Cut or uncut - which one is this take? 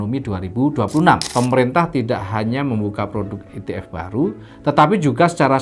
cut